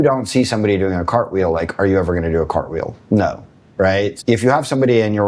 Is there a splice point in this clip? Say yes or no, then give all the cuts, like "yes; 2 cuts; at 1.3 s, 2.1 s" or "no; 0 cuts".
yes; 1 cut; at 4.2 s